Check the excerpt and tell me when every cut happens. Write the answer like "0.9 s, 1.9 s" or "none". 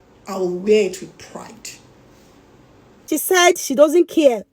3.2 s

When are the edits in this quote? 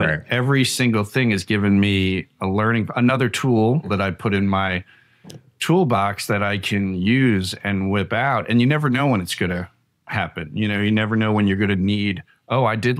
3.9 s

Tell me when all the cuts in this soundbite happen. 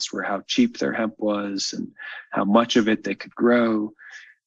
none

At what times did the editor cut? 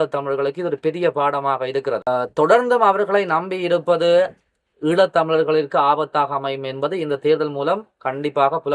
2.1 s

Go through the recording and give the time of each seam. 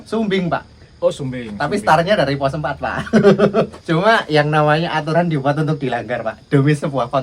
3.8 s

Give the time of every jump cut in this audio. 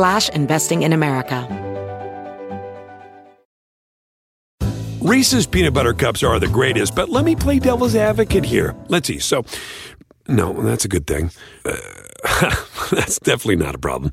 1.4 s

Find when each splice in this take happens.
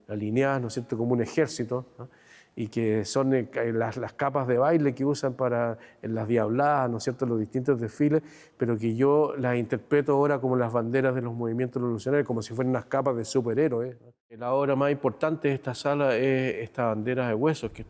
14.4 s

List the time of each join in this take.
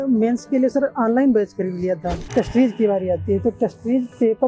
2.3 s

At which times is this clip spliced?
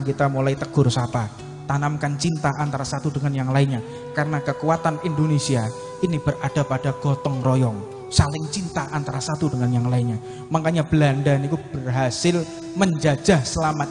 none

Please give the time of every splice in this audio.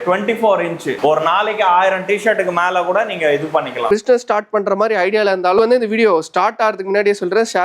1.2 s, 3.9 s, 5.6 s

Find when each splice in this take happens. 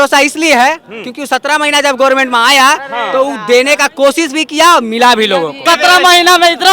5.6 s

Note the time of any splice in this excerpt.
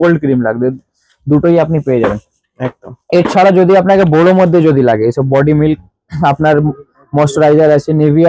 none

